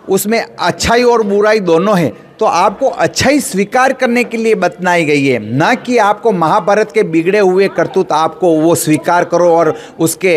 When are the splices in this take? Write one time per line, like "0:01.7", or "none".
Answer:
none